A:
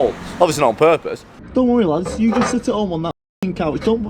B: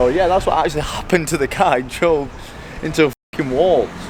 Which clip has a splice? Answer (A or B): A